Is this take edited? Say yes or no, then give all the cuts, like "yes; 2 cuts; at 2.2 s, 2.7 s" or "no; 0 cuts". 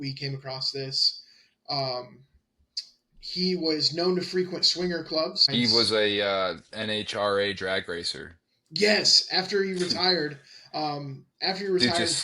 yes; 1 cut; at 5.5 s